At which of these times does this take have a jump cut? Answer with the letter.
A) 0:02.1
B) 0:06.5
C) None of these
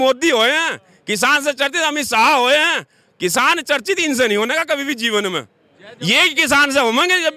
C